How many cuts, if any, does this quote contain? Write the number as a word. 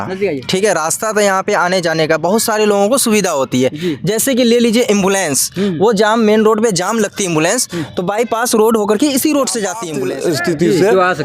one